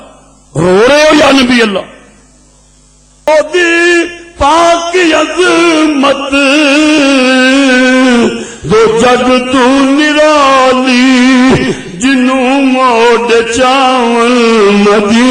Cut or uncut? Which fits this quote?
cut